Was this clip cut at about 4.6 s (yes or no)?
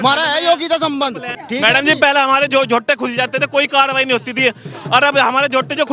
no